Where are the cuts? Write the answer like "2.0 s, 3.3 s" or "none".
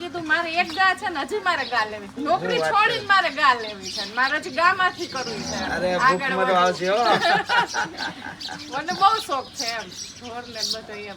none